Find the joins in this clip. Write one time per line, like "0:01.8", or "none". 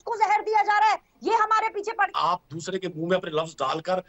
0:02.1